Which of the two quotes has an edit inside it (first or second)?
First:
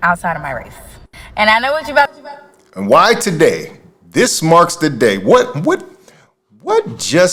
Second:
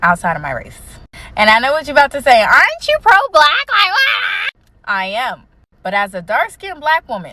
second